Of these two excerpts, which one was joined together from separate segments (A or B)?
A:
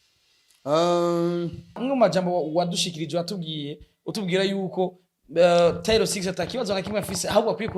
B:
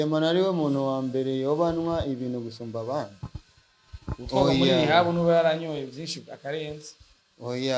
A